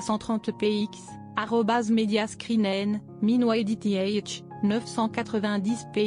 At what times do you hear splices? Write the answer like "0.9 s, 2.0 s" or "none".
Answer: none